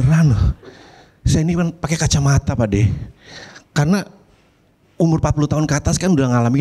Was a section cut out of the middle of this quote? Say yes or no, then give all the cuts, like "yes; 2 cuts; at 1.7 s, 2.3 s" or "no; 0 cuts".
no; 0 cuts